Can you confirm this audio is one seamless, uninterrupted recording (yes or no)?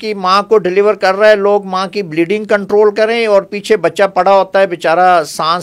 yes